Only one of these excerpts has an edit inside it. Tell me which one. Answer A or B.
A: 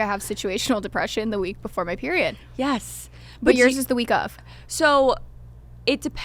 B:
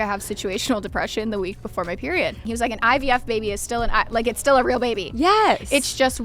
B